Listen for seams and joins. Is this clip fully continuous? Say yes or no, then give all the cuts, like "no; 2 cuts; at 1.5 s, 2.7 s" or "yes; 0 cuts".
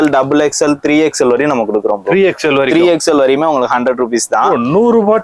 yes; 0 cuts